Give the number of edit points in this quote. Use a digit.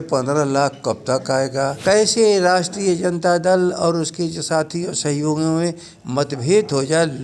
1